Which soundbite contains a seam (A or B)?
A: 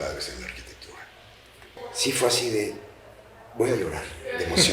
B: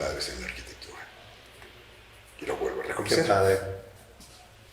A